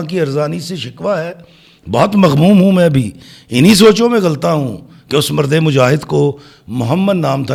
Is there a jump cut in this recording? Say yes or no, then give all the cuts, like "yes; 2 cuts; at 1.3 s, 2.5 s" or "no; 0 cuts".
no; 0 cuts